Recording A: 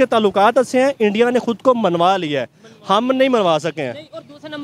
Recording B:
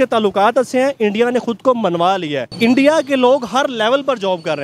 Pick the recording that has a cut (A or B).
B